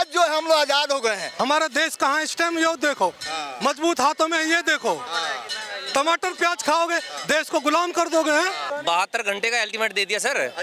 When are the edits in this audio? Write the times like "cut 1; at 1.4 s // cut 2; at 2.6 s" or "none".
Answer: cut 1; at 1.2 s // cut 2; at 8.6 s